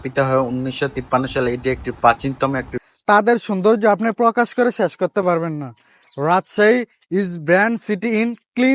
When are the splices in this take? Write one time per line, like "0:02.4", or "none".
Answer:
0:02.8